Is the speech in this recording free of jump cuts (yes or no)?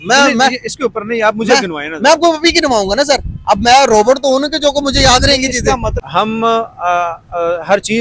no